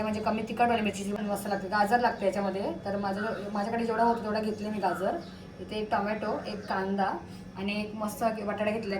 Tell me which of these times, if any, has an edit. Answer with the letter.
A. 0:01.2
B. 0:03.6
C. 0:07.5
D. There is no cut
A